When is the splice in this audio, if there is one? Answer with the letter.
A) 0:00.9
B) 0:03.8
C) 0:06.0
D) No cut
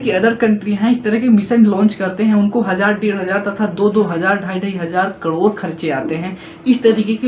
D